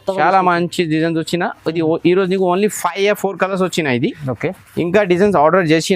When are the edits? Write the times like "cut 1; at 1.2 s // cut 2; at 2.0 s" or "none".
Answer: none